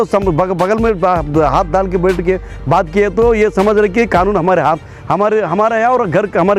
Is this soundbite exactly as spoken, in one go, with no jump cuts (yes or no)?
yes